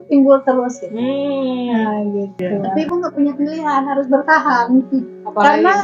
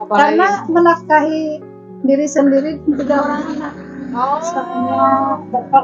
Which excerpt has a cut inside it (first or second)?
first